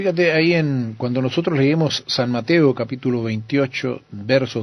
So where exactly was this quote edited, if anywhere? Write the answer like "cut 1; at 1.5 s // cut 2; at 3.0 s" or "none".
cut 1; at 1.8 s